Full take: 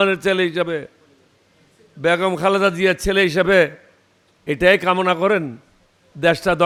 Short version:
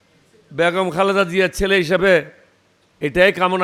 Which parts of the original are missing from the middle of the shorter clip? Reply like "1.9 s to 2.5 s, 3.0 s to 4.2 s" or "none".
none